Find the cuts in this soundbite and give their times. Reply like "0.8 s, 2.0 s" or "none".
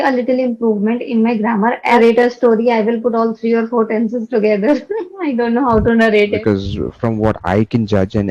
2.0 s, 6.4 s